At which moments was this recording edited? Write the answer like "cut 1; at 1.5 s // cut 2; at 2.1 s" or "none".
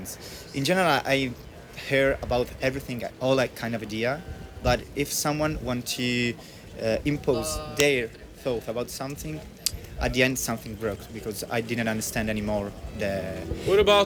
none